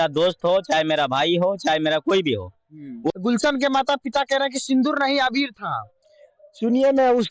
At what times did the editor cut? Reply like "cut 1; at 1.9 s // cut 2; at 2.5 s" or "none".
cut 1; at 3.1 s